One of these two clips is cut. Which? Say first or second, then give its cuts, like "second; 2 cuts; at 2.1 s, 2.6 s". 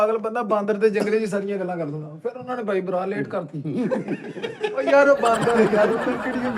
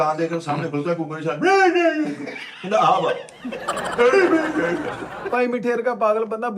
second; 1 cut; at 5.1 s